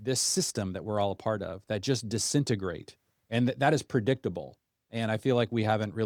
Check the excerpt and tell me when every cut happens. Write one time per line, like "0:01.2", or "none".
none